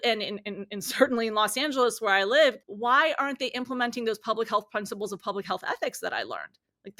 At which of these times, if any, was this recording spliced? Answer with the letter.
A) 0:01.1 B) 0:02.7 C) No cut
B